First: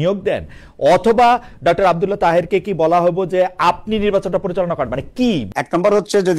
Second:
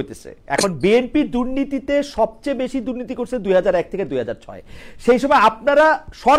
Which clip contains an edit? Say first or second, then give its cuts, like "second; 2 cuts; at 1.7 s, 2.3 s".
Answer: first; 1 cut; at 5.5 s